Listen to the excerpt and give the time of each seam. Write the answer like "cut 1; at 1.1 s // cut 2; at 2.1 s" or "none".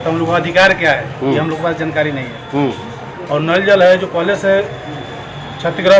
none

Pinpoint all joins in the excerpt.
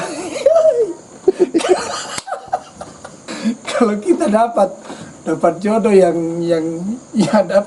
cut 1; at 3.2 s

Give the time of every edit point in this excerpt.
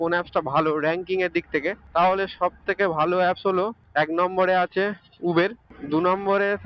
none

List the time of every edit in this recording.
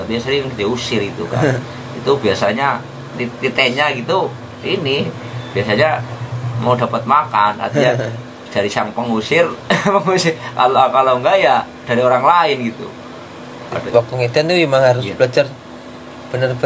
cut 1; at 13.7 s

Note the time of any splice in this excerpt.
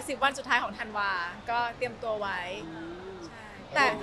none

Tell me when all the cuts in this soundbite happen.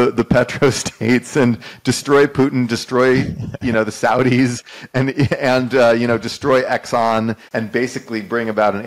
cut 1; at 7.4 s

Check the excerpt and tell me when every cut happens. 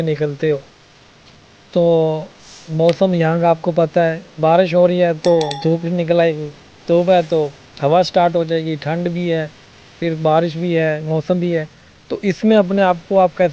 none

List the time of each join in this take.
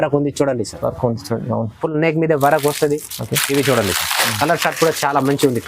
none

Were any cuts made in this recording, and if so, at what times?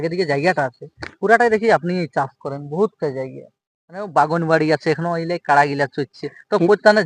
none

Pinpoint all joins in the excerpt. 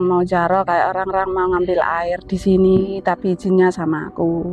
none

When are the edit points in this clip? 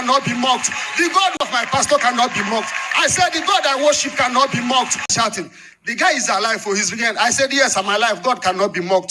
cut 1; at 1.5 s // cut 2; at 5.1 s

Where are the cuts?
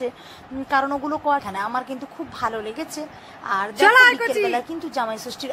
cut 1; at 1.4 s

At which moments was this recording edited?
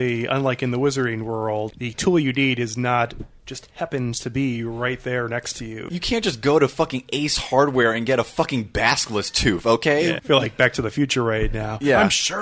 cut 1; at 1.7 s // cut 2; at 5.8 s // cut 3; at 10.2 s

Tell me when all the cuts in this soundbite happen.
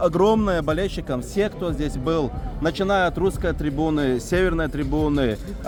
none

